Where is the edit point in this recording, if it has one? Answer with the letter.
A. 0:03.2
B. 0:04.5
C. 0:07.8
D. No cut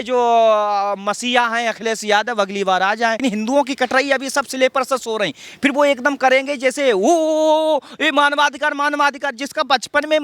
A